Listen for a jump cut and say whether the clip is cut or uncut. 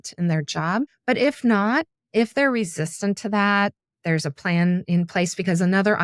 cut